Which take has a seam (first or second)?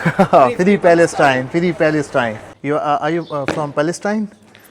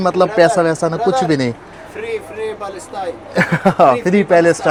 first